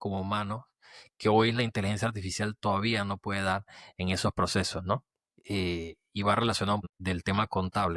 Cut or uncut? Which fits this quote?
cut